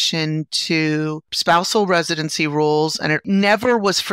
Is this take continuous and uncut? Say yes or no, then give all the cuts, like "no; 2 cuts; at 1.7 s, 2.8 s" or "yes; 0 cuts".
no; 2 cuts; at 1.3 s, 3.2 s